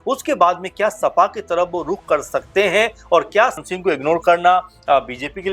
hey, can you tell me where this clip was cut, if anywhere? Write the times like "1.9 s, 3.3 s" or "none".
3.6 s